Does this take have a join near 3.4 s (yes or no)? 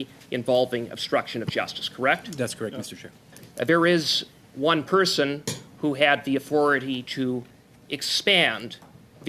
yes